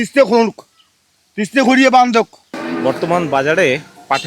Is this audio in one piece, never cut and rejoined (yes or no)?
no